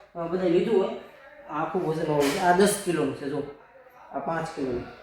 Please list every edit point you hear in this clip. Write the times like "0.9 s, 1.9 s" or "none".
none